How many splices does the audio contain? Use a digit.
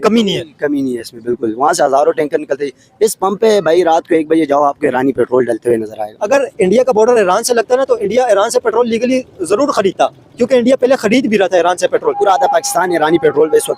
2